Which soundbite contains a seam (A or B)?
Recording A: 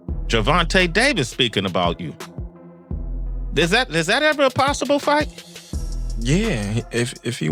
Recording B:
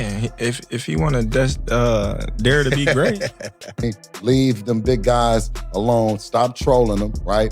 B